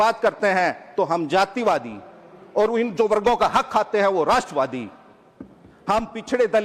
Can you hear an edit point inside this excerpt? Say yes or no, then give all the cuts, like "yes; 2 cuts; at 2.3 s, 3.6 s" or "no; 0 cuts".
no; 0 cuts